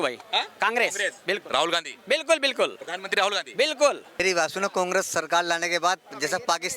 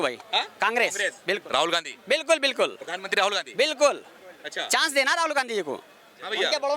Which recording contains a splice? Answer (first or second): first